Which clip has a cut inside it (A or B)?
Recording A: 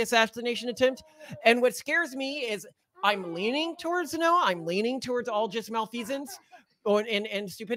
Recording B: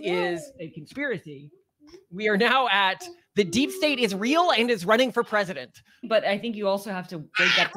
B